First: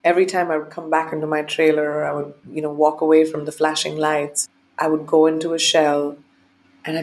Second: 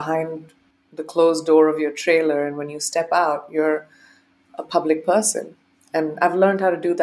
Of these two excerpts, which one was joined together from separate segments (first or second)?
first